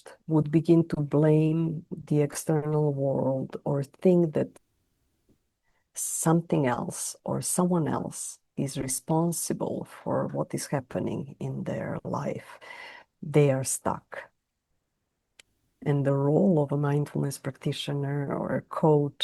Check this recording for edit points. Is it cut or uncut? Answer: uncut